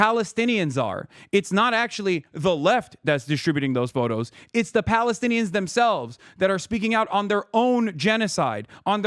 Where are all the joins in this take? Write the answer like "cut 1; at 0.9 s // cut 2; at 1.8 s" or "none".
none